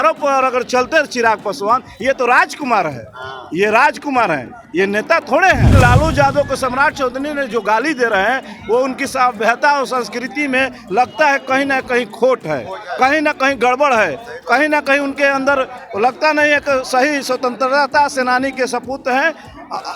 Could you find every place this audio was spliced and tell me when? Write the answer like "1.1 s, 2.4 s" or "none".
5.7 s